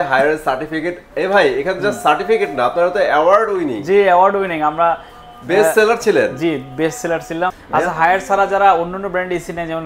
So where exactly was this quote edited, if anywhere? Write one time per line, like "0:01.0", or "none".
0:07.6